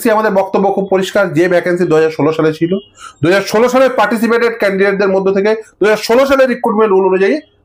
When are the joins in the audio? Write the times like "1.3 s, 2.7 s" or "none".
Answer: none

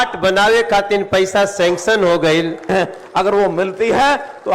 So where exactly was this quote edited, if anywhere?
2.7 s

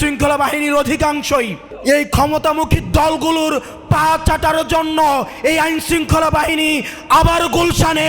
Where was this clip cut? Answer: 1.6 s

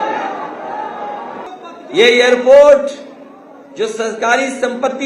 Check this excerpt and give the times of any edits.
1.5 s

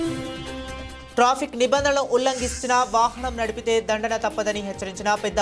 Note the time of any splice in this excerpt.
1.0 s

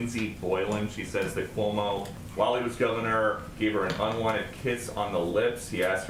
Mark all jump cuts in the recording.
none

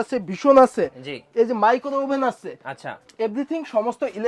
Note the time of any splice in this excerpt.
none

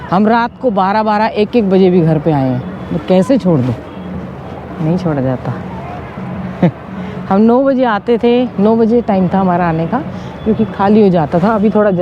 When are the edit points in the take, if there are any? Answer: none

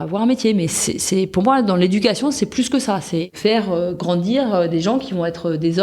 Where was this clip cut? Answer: 3.3 s

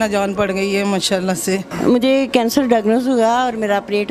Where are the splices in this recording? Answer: 1.7 s

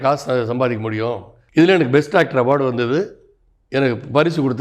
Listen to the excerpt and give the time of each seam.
1.4 s

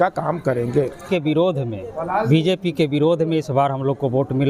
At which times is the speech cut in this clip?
1.1 s

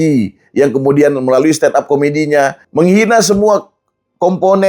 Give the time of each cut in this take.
2.6 s

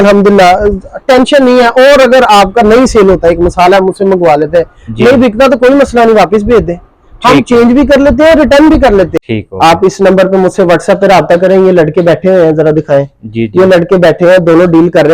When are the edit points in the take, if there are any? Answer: 9.1 s

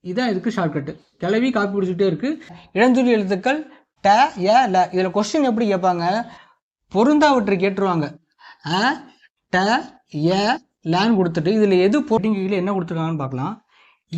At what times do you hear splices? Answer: 2.6 s, 12.2 s

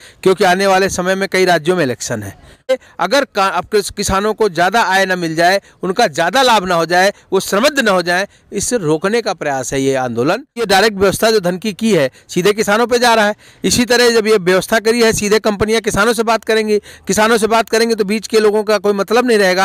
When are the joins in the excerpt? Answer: 2.7 s, 10.6 s

